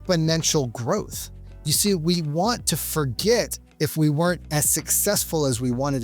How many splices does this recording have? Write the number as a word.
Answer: one